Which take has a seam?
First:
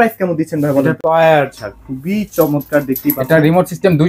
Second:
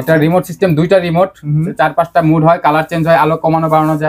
first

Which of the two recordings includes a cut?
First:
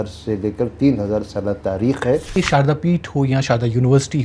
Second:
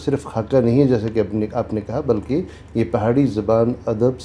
first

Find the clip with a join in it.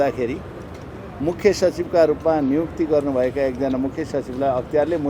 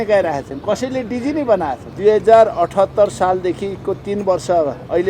second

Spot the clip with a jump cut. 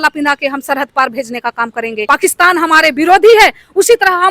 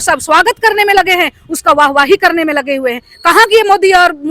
first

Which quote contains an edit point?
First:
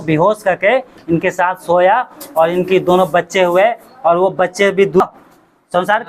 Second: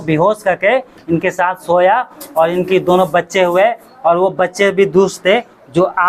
first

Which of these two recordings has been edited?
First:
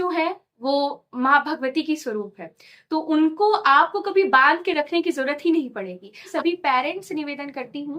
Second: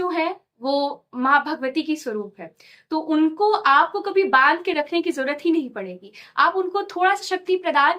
first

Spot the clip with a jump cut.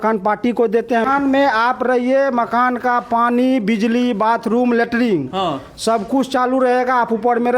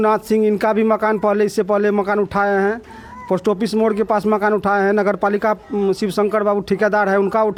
first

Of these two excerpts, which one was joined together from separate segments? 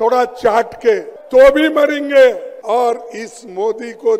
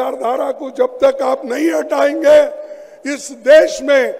first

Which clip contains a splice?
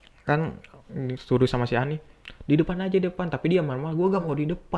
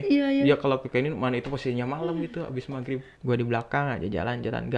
second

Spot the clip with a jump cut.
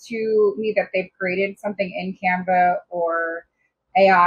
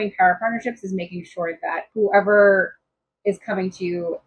second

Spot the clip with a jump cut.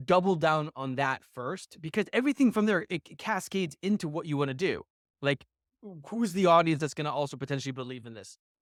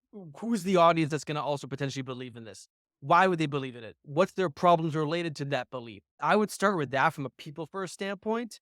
second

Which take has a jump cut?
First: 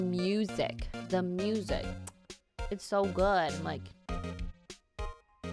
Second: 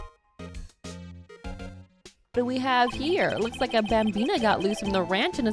second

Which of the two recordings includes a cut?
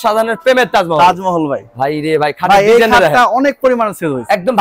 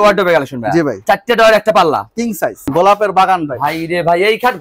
second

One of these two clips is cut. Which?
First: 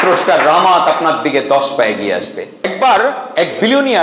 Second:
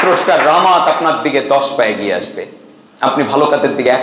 first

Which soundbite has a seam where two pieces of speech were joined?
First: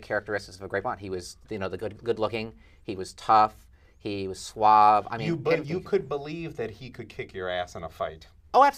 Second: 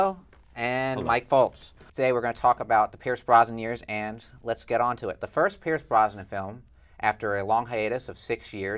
second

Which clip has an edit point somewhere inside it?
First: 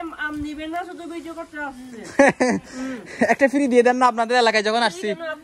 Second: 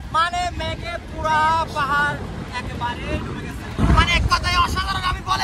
second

